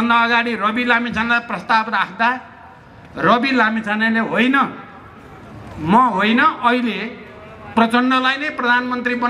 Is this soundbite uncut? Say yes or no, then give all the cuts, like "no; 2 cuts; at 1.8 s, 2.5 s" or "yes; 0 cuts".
yes; 0 cuts